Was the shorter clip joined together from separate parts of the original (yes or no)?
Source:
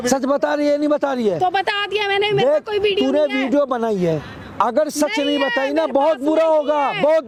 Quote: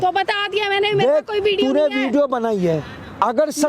no